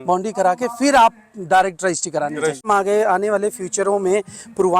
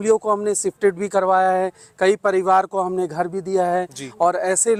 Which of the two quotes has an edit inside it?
first; 1 cut; at 2.7 s

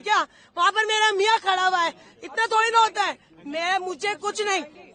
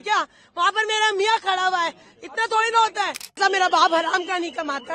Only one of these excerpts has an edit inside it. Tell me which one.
second; 1 cut; at 3.4 s

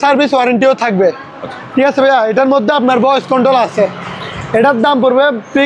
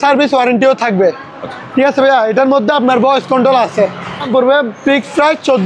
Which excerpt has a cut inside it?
second; 1 cut; at 4.3 s

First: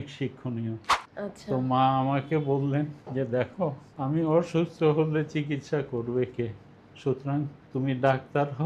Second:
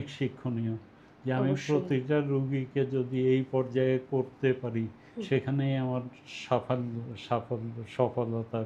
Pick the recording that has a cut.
first; 4 cuts; at 1.0 s, 3.0 s, 3.9 s, 7.6 s

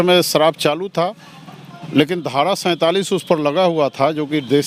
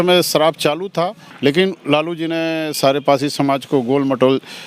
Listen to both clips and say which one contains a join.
second; 1 cut; at 1.2 s

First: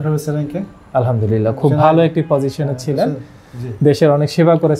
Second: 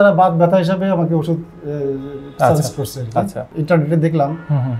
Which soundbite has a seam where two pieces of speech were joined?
second; 1 cut; at 3.5 s

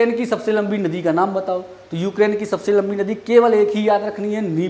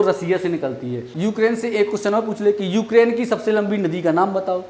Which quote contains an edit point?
second; 1 cut; at 1.1 s

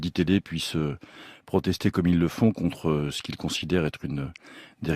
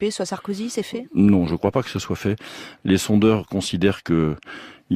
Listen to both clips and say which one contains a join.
first; 1 cut; at 1.7 s

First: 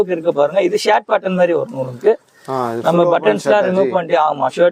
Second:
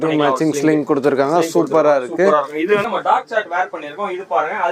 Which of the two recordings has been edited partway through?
second; 1 cut; at 2.8 s

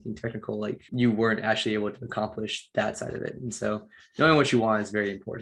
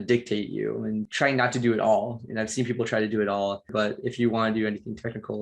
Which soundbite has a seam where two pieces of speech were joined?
second; 1 cut; at 3.7 s

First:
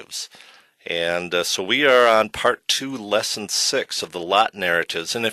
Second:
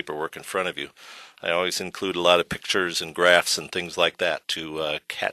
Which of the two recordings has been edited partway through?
first; 1 cut; at 4.1 s

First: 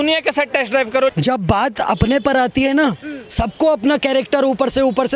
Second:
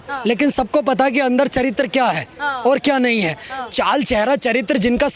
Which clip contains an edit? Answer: first; 1 cut; at 1.1 s

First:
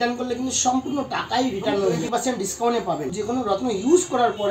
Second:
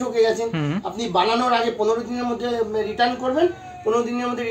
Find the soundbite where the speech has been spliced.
first; 2 cuts; at 2.0 s, 3.2 s

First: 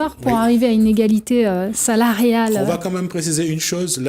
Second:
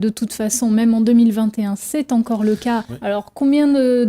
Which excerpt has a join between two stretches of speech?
second; 1 cut; at 2.8 s

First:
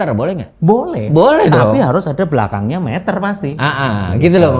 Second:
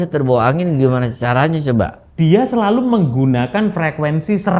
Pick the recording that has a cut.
second; 1 cut; at 2.0 s

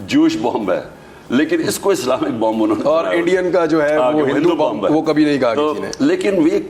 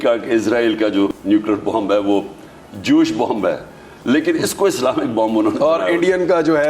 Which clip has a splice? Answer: second; 1 cut; at 1.2 s

